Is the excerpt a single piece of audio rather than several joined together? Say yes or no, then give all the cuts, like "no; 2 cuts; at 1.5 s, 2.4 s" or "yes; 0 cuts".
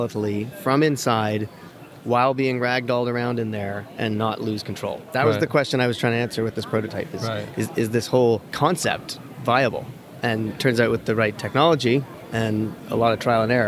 no; 2 cuts; at 8.5 s, 12.5 s